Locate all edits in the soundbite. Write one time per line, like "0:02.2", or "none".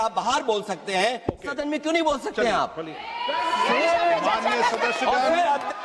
none